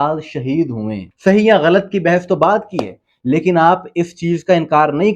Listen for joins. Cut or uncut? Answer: cut